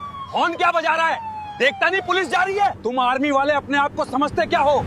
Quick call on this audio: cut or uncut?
cut